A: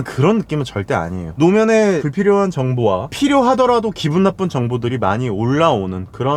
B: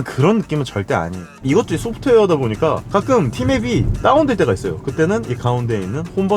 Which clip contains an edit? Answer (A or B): B